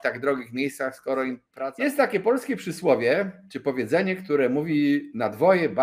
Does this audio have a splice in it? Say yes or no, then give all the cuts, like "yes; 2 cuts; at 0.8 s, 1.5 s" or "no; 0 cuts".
yes; 1 cut; at 1.5 s